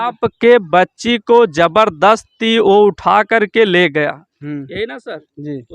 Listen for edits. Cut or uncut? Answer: uncut